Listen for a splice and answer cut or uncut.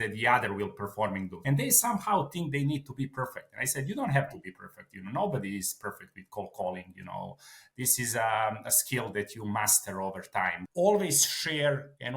cut